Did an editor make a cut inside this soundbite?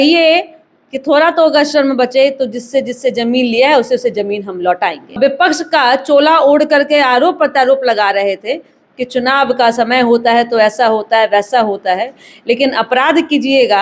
yes; 1 cut; at 5.2 s

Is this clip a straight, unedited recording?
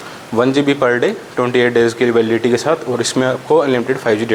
yes; 0 cuts

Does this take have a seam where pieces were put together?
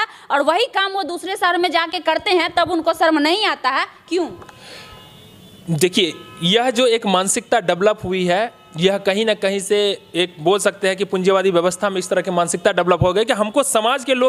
no; 0 cuts

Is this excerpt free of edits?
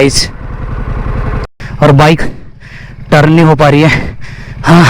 no; 1 cut; at 1.6 s

